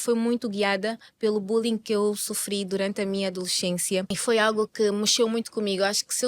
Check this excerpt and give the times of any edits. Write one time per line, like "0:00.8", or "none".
0:04.1